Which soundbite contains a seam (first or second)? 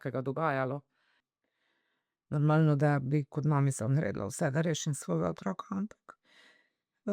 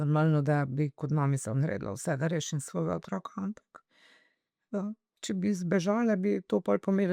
first